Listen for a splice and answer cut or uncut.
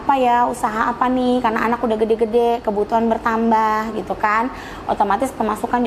uncut